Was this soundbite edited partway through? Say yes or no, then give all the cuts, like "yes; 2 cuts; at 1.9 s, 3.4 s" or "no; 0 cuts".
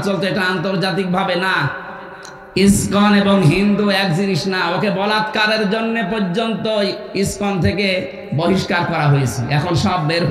yes; 1 cut; at 8.2 s